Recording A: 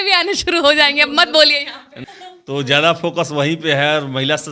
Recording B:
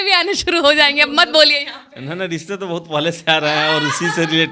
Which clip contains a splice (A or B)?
A